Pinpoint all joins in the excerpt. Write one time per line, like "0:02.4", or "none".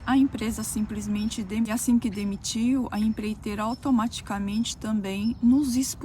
0:01.7